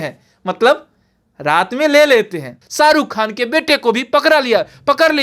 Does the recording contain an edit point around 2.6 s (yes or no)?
yes